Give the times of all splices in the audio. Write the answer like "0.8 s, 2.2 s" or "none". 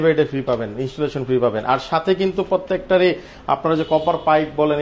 none